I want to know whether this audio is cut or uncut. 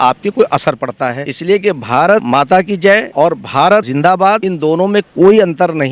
cut